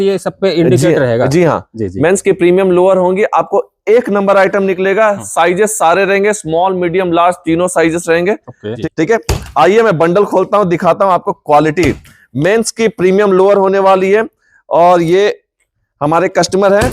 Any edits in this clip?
yes; 1 cut; at 8.7 s

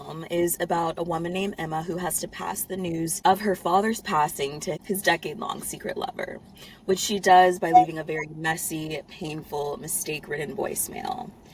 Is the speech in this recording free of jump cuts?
no; 2 cuts; at 3.1 s, 4.8 s

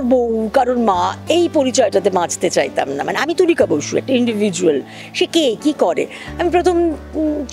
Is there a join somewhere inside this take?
no; 0 cuts

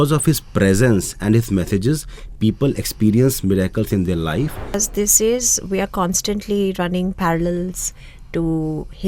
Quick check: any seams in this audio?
yes; 1 cut; at 4.7 s

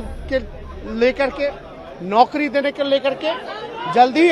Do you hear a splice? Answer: no; 0 cuts

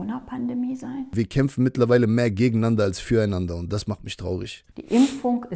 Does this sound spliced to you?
yes; 2 cuts; at 1.1 s, 4.6 s

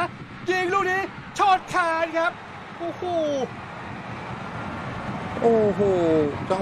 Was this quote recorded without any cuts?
yes; 0 cuts

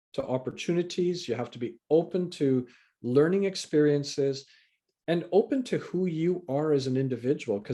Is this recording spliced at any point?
no; 0 cuts

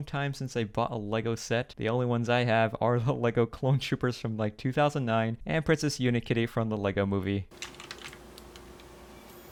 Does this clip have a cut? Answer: no; 0 cuts

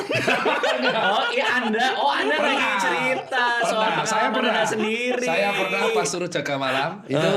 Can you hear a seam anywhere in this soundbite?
no; 0 cuts

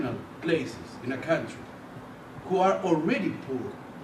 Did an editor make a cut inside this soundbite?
yes; 1 cut; at 2.8 s

